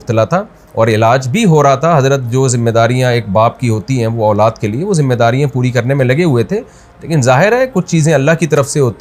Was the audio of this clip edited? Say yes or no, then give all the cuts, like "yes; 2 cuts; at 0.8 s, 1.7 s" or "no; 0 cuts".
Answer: no; 0 cuts